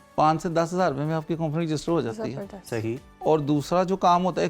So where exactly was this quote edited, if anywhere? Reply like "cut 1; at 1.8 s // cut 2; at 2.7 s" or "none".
none